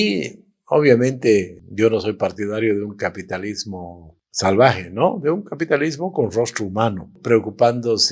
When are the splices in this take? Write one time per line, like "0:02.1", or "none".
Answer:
0:07.2